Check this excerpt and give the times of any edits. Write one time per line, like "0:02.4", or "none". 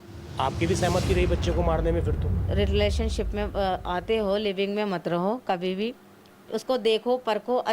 0:02.4